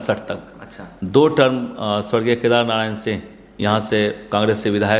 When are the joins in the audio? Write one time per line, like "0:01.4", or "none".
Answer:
none